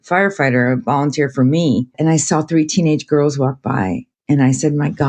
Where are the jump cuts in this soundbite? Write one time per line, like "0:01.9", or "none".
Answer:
0:02.0
0:04.1